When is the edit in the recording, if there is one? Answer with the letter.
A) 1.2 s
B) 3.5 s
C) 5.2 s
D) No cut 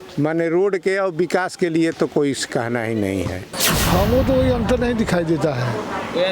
B